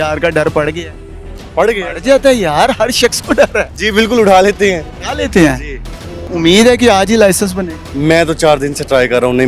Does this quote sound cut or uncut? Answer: cut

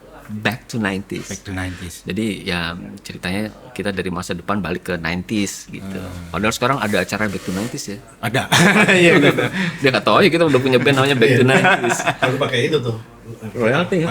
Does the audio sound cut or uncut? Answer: uncut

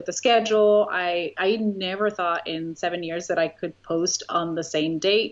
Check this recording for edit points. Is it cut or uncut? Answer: uncut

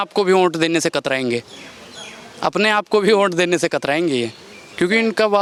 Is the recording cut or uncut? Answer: uncut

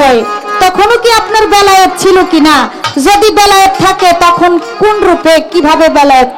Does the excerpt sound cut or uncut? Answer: uncut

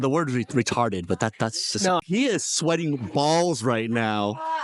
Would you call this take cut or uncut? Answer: cut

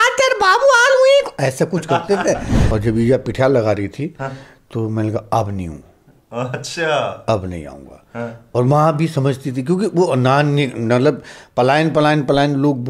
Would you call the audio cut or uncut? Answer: cut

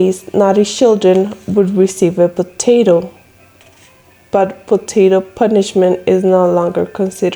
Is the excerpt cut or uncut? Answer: uncut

